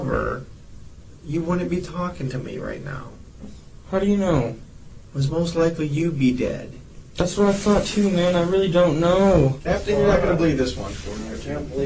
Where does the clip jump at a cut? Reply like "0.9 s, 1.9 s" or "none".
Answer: 9.6 s